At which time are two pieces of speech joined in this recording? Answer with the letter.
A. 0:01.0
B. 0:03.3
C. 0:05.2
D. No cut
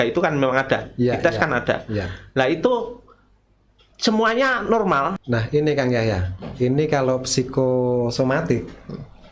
C